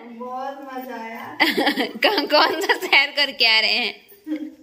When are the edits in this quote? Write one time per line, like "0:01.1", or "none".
none